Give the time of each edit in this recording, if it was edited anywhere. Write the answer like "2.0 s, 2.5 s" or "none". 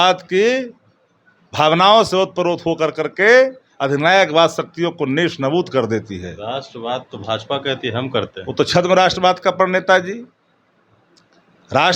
none